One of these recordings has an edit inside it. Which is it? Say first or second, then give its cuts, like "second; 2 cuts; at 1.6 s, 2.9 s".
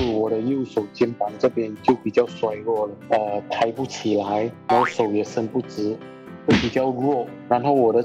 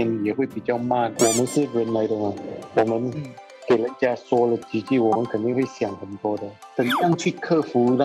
second; 1 cut; at 1.1 s